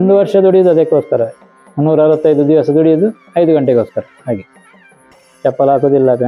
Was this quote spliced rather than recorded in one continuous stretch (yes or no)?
no